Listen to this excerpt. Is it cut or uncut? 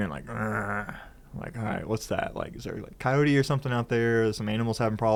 uncut